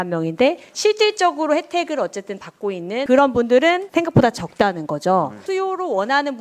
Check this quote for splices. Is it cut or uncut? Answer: cut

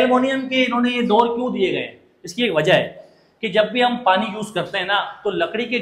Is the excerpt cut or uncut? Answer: uncut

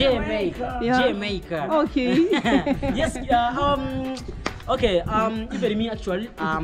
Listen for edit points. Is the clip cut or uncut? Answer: uncut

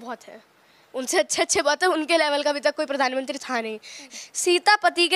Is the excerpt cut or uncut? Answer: cut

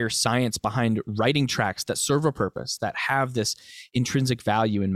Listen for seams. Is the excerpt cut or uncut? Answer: uncut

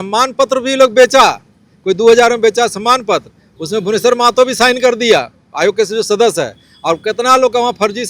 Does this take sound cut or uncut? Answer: uncut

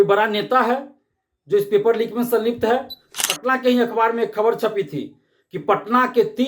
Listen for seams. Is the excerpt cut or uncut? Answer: cut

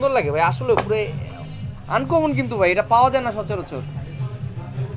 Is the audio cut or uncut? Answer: uncut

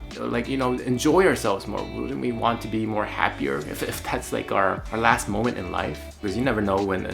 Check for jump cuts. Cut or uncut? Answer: cut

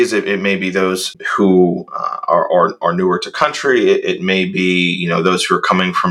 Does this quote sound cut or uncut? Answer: cut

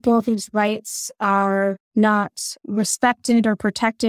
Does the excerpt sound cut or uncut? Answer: uncut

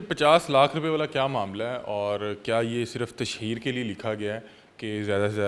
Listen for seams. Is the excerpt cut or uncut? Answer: uncut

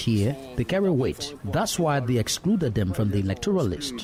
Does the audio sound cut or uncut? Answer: uncut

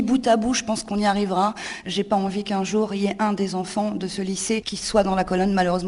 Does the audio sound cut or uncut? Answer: cut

